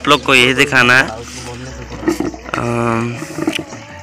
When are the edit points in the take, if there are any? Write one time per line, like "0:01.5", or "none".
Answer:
none